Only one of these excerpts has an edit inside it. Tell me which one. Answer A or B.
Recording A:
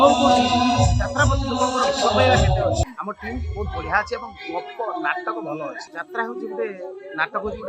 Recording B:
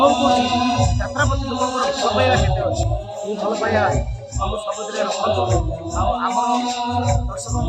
A